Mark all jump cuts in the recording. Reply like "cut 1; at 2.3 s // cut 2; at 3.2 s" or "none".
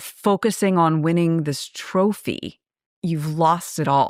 none